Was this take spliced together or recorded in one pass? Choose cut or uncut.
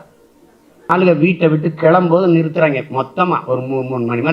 cut